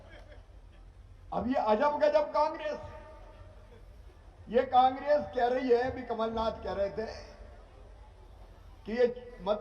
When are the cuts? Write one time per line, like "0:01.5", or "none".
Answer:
none